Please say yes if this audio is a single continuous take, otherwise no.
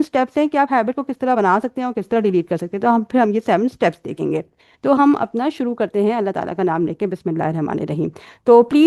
yes